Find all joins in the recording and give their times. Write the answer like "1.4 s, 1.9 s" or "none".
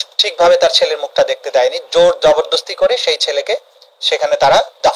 none